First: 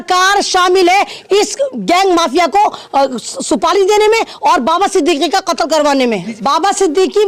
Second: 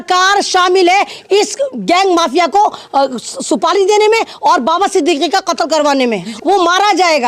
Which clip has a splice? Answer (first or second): second